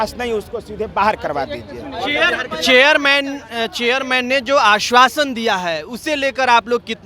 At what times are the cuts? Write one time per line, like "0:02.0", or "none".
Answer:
none